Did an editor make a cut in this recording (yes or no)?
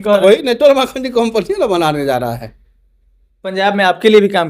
yes